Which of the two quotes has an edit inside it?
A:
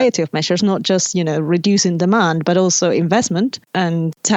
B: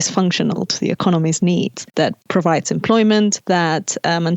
B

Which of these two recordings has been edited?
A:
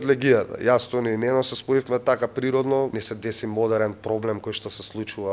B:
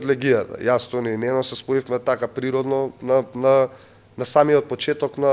A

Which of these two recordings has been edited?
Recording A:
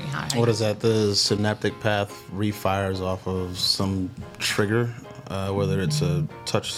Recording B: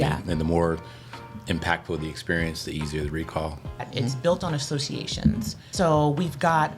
B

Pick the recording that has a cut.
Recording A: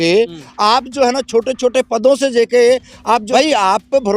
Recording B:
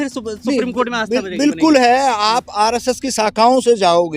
A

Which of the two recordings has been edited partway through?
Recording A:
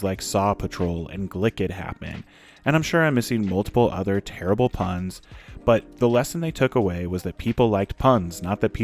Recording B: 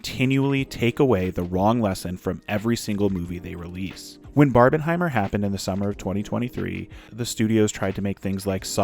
B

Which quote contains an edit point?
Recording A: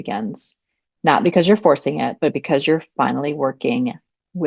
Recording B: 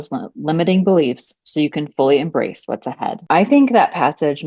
B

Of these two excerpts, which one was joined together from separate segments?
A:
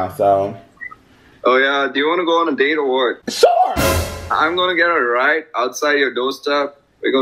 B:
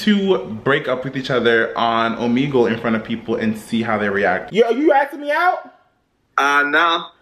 B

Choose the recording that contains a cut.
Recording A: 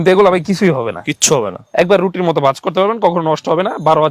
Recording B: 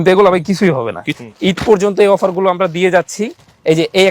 B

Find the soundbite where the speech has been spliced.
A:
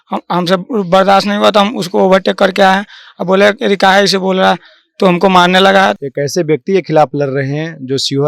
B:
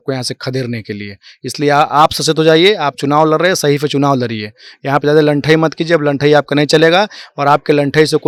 A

